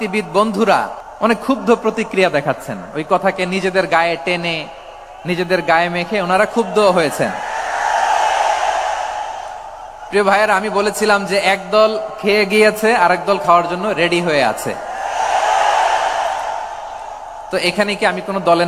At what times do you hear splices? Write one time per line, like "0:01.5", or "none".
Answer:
0:01.0